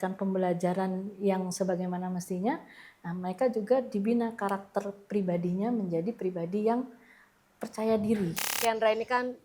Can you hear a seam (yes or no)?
yes